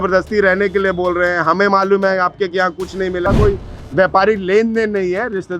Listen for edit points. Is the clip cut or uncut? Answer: cut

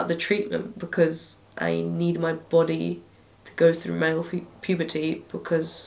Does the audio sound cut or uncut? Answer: uncut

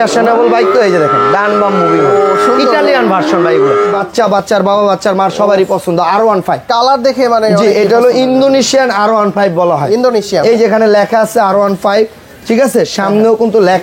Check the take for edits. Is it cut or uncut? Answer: cut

